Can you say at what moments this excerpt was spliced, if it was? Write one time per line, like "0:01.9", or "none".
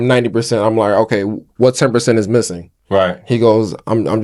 none